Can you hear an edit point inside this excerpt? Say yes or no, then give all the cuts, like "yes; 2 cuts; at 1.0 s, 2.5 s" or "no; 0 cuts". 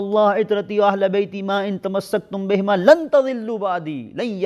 no; 0 cuts